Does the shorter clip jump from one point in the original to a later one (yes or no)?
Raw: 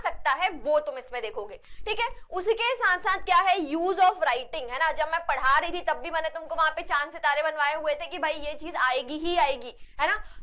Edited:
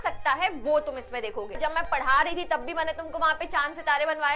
yes